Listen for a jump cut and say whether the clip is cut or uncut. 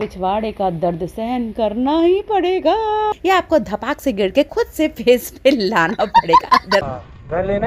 cut